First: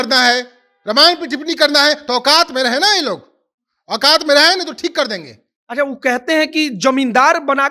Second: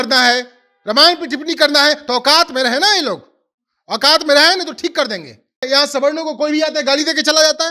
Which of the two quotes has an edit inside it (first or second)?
second